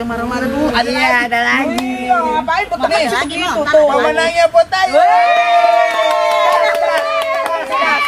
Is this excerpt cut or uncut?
uncut